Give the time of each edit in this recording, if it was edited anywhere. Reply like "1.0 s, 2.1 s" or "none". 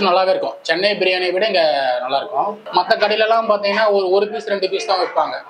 2.6 s